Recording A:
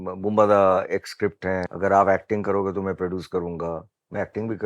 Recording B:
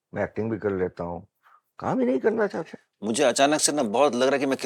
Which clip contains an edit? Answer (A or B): A